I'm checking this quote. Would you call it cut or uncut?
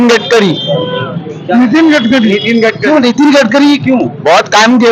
uncut